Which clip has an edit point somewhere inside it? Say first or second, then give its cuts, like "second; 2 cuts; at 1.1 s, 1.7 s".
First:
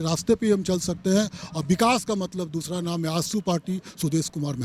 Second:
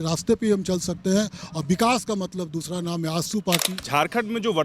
second; 1 cut; at 3.8 s